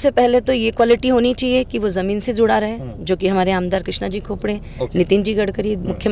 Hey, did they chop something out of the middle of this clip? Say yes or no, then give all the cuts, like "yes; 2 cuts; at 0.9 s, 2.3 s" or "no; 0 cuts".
no; 0 cuts